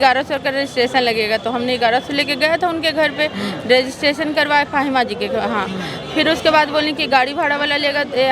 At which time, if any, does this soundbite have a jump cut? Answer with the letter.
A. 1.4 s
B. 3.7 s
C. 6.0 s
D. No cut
D